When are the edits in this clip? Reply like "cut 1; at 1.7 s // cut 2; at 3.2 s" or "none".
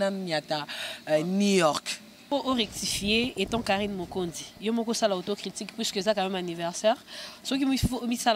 cut 1; at 2.3 s